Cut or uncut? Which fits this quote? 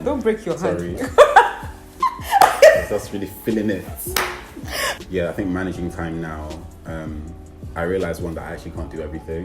cut